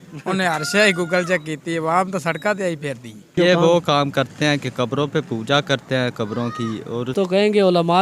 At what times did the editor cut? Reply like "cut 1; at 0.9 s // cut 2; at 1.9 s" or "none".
cut 1; at 3.4 s // cut 2; at 7.1 s